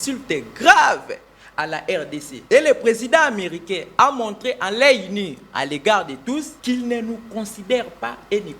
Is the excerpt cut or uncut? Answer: cut